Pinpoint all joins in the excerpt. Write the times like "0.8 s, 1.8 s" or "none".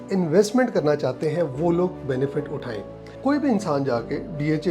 3.2 s